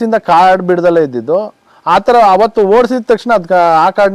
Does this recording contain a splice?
no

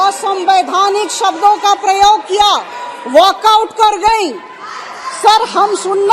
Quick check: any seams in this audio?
no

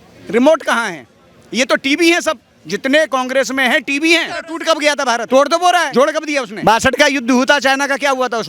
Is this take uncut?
no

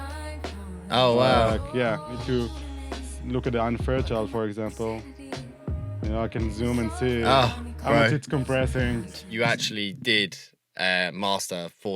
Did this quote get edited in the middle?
yes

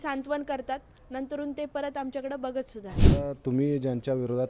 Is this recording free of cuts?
no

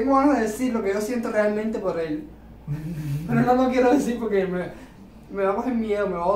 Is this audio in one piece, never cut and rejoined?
yes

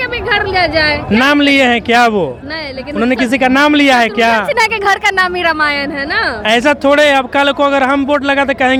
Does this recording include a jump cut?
no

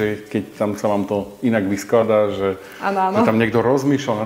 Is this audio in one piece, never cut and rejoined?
yes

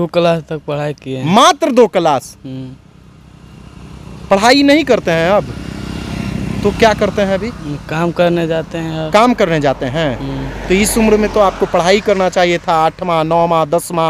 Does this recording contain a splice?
no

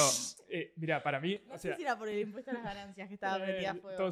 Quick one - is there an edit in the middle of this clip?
no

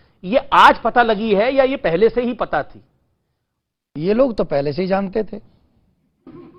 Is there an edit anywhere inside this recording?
no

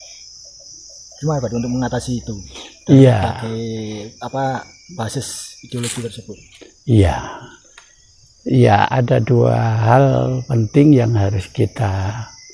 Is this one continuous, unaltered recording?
yes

